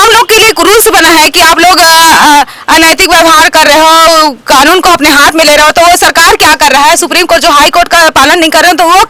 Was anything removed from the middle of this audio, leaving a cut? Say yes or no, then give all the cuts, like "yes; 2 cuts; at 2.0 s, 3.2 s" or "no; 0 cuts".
no; 0 cuts